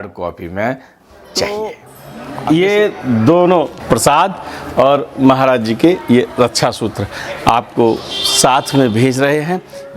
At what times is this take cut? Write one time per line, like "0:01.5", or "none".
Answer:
0:01.5
0:03.8